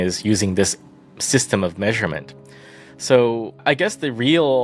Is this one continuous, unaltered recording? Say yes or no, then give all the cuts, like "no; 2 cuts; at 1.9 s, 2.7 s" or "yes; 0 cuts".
no; 1 cut; at 3.6 s